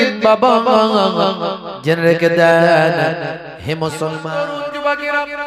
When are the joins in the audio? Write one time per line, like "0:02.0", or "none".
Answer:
0:04.2